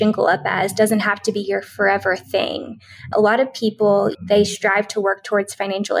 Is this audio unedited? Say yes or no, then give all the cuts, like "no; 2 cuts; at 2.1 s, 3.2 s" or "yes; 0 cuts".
no; 2 cuts; at 3.1 s, 4.1 s